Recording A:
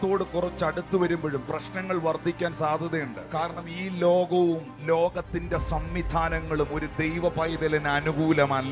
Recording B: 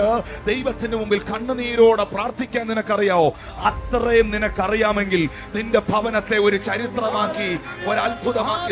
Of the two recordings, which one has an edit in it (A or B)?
A